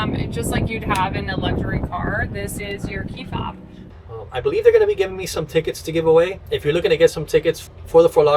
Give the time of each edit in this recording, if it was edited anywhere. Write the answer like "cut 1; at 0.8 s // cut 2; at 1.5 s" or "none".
cut 1; at 3.8 s // cut 2; at 6.4 s